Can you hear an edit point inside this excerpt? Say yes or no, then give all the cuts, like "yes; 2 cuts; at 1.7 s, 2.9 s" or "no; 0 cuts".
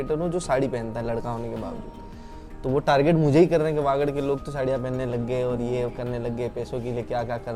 no; 0 cuts